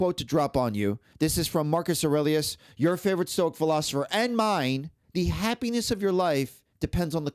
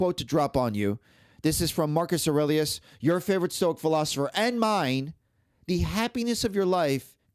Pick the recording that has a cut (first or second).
first